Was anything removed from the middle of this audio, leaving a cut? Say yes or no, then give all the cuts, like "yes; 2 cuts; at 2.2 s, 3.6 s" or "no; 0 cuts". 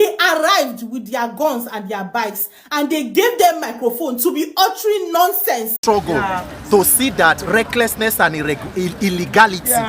yes; 1 cut; at 5.7 s